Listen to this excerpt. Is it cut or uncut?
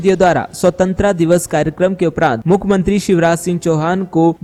uncut